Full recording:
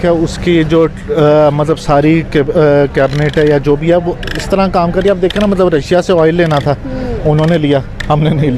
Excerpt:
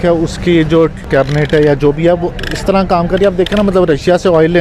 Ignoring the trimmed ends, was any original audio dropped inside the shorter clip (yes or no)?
yes